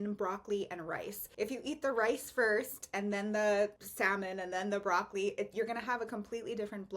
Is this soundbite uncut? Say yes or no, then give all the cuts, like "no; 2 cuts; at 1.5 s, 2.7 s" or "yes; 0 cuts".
no; 2 cuts; at 1.2 s, 3.8 s